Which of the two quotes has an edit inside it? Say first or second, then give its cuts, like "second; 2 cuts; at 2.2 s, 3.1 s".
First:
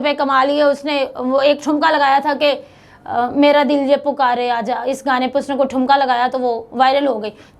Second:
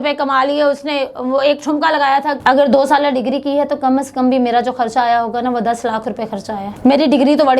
second; 2 cuts; at 2.3 s, 6.7 s